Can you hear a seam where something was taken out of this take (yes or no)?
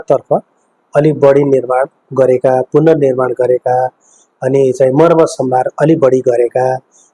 no